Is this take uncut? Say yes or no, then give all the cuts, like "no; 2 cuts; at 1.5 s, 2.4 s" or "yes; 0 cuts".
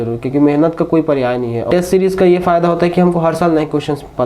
no; 1 cut; at 1.7 s